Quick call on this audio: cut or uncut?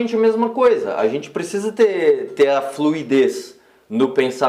uncut